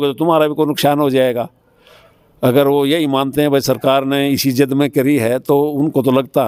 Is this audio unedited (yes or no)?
yes